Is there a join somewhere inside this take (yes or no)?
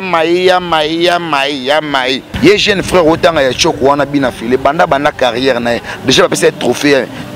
yes